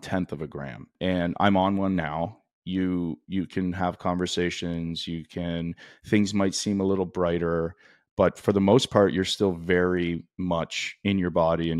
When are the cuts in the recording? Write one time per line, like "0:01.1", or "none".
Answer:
0:00.9